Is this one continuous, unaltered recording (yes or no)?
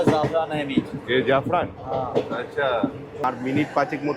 no